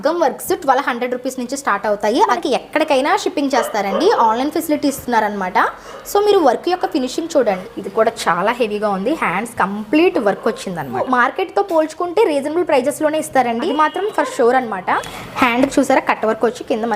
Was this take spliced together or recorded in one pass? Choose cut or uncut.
cut